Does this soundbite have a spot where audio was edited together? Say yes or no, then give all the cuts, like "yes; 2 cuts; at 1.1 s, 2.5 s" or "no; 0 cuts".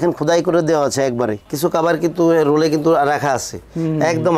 yes; 1 cut; at 1.5 s